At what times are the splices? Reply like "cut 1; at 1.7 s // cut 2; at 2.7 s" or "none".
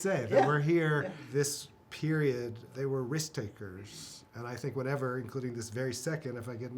cut 1; at 1.2 s // cut 2; at 2.6 s